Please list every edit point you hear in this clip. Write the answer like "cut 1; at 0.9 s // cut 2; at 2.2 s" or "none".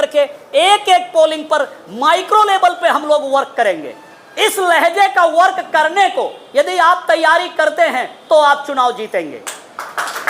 none